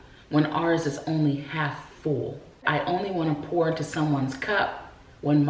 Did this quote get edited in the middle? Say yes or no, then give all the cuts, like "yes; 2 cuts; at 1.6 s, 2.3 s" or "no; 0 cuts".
yes; 1 cut; at 2.6 s